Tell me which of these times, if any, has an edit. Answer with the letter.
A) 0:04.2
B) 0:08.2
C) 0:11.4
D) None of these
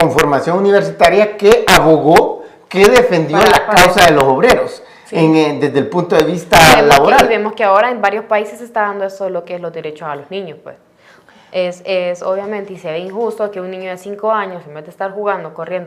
D